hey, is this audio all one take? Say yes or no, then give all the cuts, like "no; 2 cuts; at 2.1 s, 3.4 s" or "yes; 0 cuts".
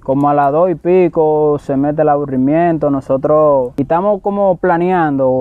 no; 1 cut; at 3.7 s